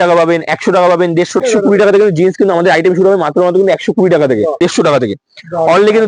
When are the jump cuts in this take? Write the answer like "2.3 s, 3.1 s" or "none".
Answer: 1.4 s, 4.6 s